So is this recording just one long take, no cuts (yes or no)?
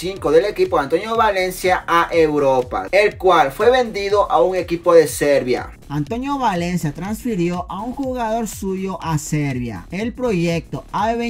yes